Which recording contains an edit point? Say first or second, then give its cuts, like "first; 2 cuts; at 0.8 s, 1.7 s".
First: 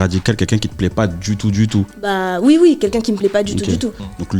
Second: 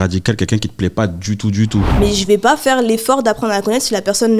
second; 1 cut; at 1.9 s